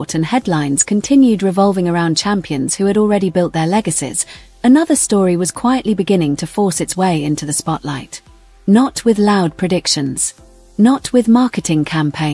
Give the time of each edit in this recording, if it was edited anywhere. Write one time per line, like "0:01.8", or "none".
none